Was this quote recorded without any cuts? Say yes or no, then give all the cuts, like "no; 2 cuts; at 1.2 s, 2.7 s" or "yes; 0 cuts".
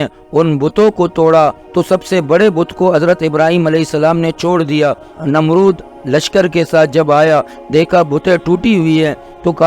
no; 2 cuts; at 1.6 s, 5.1 s